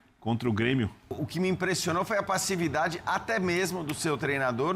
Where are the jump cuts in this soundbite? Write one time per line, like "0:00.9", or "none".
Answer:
0:01.1

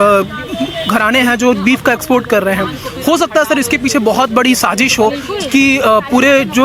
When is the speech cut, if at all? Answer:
none

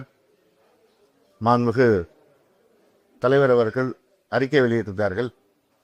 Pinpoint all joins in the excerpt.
none

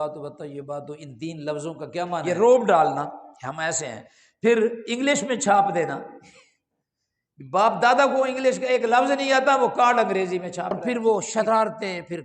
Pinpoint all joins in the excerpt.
0:02.2
0:10.8

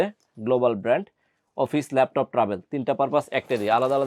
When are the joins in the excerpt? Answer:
none

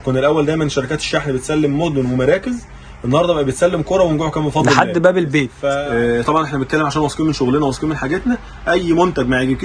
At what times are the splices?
0:05.6

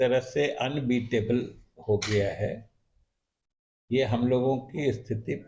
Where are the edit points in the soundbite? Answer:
none

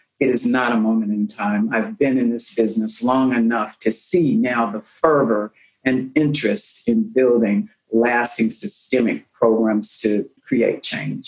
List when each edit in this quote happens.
0:10.4

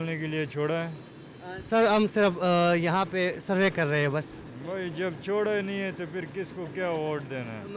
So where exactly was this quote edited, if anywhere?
none

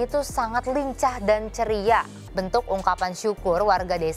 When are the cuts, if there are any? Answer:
0:02.2

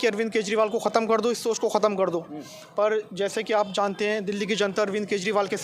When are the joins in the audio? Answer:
none

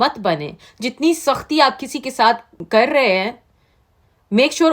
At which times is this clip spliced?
0:02.5

